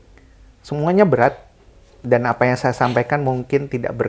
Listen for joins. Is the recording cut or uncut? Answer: uncut